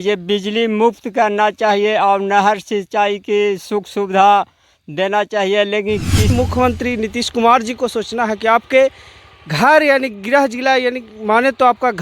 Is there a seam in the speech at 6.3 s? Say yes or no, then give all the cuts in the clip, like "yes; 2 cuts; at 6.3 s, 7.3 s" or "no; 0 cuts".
yes; 1 cut; at 6.3 s